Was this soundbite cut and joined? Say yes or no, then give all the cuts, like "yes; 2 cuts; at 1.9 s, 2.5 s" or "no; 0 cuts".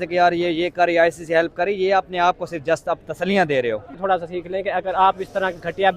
yes; 1 cut; at 3.9 s